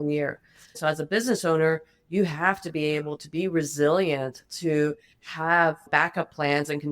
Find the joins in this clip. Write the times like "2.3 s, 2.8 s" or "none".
0.8 s, 5.9 s